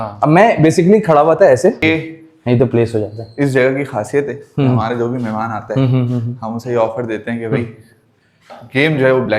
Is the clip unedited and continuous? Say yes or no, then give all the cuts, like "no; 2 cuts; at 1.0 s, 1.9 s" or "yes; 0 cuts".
no; 1 cut; at 1.8 s